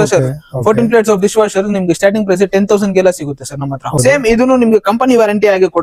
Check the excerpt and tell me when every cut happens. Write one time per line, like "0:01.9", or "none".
0:04.0